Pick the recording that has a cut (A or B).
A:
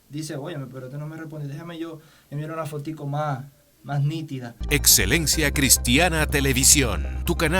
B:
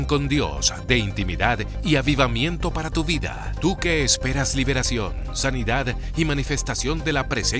A